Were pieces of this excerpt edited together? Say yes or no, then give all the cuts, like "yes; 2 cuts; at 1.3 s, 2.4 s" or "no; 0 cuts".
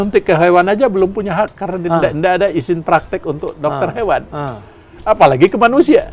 no; 0 cuts